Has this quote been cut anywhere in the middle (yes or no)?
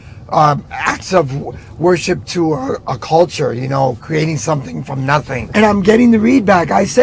yes